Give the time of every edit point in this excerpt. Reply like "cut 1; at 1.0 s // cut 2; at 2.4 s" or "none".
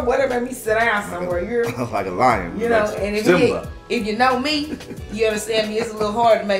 none